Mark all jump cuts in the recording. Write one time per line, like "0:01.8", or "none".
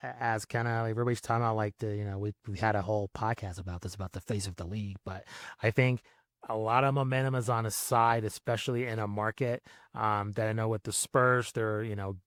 none